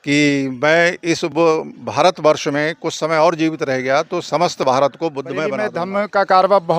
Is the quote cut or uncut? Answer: cut